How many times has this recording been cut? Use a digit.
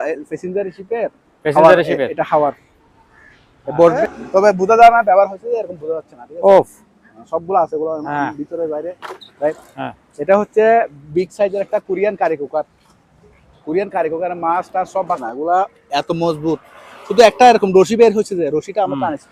3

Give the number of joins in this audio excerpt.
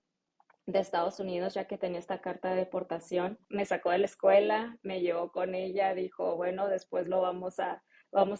1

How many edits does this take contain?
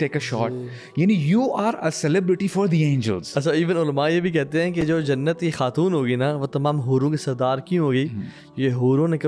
0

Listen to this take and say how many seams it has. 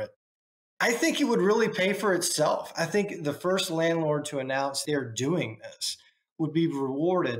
1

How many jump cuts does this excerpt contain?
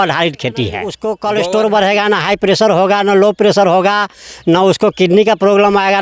1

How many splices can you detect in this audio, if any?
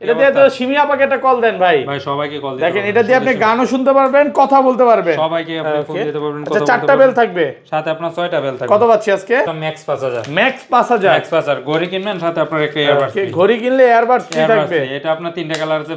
1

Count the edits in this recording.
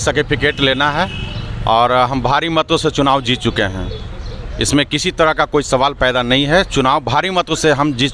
0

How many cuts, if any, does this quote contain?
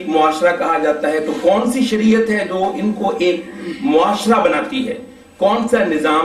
0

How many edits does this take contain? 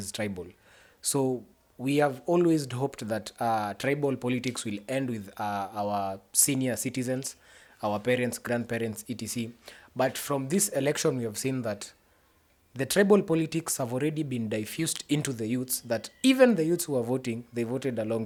0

